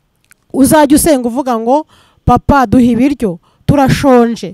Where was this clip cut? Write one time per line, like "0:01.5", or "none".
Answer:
none